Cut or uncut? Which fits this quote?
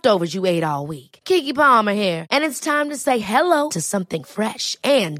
uncut